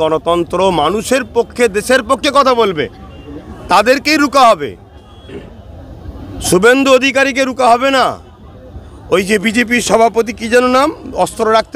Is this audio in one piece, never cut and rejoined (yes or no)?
yes